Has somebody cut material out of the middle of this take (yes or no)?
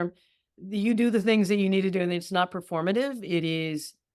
no